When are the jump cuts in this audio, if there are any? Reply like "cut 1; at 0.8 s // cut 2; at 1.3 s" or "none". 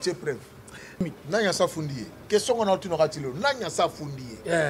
cut 1; at 1.0 s